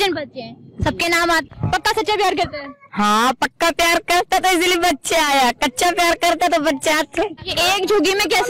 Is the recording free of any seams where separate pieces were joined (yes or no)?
no